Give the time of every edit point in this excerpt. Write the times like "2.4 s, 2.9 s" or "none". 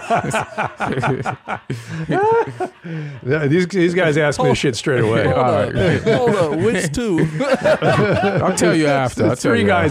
none

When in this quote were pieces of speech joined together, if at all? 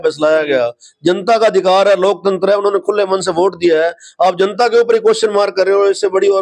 none

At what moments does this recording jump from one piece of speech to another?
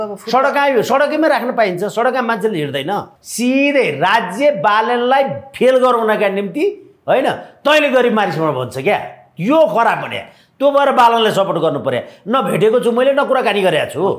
3.2 s

